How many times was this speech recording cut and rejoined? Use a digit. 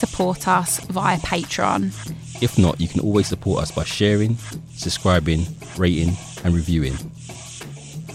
1